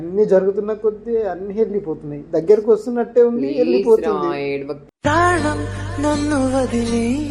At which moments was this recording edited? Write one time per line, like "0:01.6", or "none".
none